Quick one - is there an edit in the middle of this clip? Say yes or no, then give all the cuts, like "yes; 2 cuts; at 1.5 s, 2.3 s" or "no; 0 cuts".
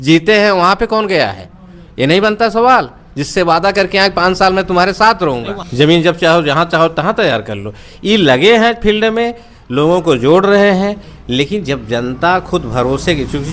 no; 0 cuts